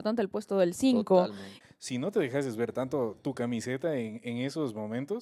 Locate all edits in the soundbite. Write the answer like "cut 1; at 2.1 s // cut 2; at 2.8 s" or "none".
cut 1; at 1.5 s